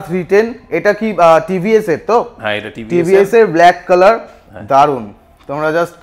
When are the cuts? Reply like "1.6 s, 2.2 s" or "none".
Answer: none